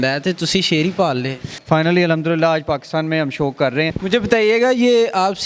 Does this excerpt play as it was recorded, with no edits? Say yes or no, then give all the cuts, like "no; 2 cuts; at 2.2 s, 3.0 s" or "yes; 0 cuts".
no; 2 cuts; at 1.5 s, 3.9 s